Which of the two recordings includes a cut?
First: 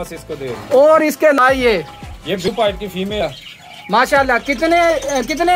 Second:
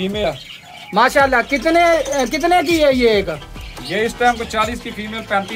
first; 1 cut; at 1.4 s

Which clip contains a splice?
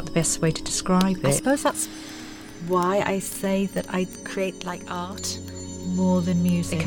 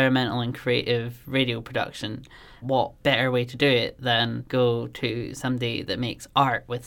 second; 2 cuts; at 2.5 s, 4.4 s

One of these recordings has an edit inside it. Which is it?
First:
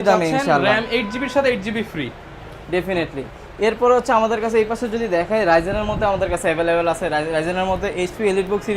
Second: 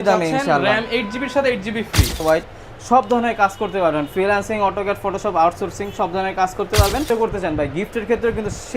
second; 2 cuts; at 2.2 s, 7.1 s

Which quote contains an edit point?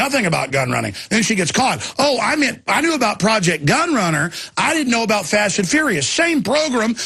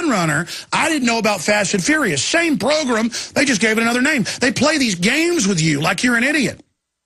first; 1 cut; at 1.3 s

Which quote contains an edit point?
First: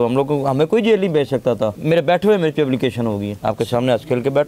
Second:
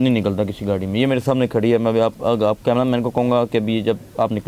first; 2 cuts; at 1.8 s, 3.3 s

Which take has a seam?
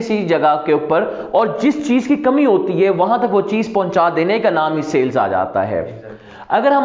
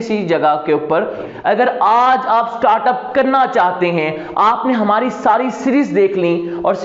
second; 1 cut; at 1.2 s

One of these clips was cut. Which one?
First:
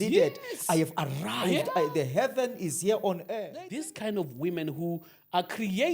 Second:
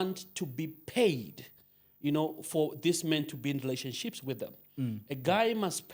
first; 1 cut; at 3.3 s

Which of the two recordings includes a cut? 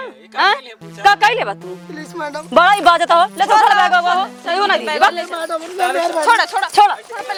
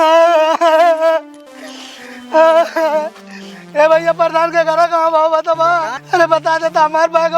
second; 1 cut; at 6.0 s

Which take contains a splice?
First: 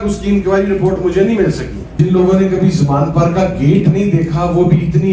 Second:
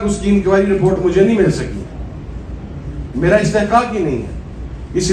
first; 1 cut; at 1.8 s

